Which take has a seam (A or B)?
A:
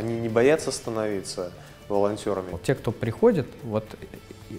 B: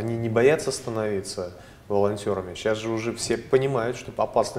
A